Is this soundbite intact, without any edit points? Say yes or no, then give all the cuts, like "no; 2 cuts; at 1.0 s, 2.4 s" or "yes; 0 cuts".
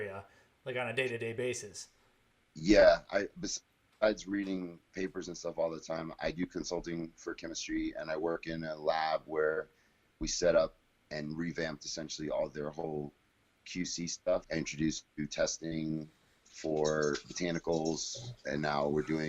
no; 1 cut; at 14.5 s